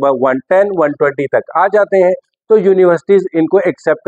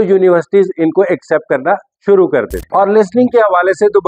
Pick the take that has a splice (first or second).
second